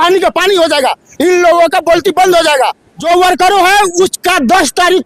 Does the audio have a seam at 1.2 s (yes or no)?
no